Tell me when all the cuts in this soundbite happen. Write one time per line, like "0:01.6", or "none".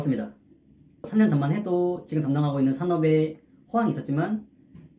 0:01.0